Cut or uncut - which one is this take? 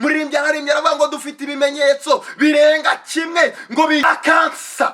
cut